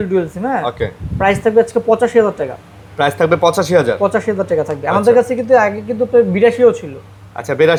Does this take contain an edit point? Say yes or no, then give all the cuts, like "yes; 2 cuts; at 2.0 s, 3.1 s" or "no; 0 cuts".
no; 0 cuts